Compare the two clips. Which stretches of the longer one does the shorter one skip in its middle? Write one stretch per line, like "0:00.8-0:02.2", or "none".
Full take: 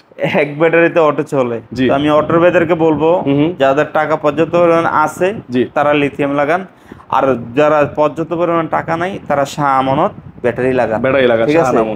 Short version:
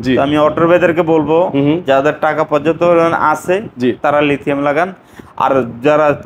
none